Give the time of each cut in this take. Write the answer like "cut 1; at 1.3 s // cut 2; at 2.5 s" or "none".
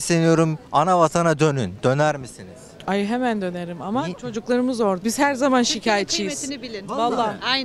cut 1; at 5.0 s